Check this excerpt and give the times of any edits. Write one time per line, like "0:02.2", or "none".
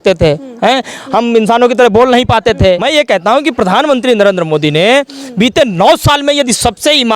0:02.8